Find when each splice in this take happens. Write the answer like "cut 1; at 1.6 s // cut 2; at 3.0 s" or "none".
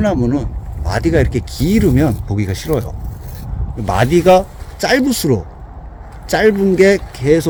none